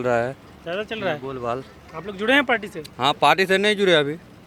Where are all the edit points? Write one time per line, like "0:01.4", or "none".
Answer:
none